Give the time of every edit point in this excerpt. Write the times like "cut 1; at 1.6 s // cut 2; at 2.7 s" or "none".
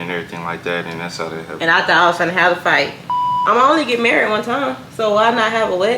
cut 1; at 3.3 s